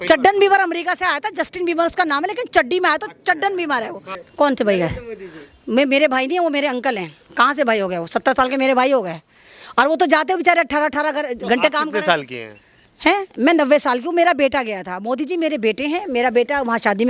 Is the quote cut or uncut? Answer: cut